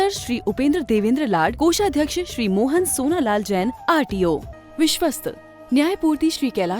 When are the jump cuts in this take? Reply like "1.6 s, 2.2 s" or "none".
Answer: 4.5 s

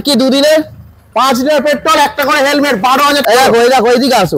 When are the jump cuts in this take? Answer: 3.2 s

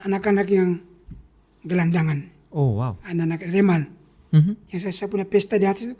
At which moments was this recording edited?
4.1 s

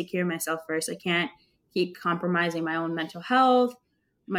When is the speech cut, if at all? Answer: none

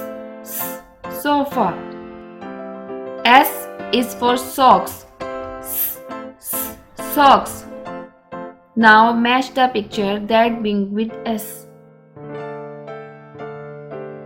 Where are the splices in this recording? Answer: 1.2 s, 11.4 s

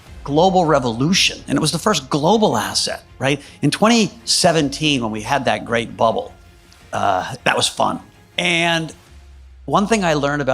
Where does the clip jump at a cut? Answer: 8.2 s

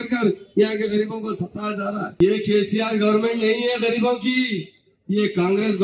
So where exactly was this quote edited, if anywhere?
2.1 s

